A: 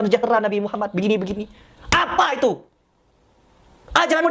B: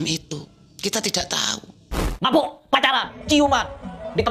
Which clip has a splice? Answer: B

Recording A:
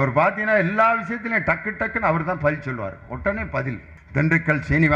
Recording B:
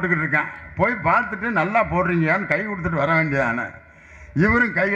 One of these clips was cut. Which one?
A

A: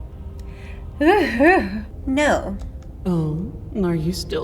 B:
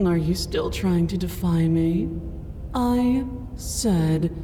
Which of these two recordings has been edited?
A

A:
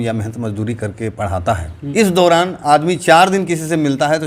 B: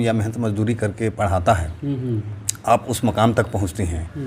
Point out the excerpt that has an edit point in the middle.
A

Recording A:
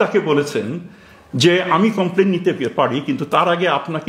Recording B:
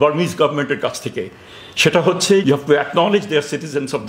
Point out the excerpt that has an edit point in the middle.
B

